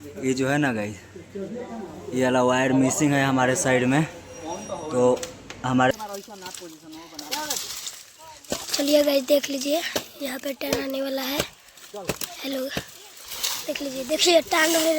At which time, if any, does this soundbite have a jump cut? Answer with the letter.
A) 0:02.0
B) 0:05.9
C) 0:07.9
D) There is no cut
B